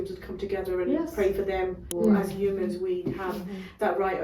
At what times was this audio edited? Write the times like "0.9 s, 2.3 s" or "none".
1.8 s